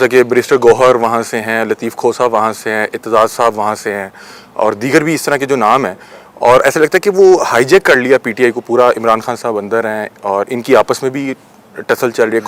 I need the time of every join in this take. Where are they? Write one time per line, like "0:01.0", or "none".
none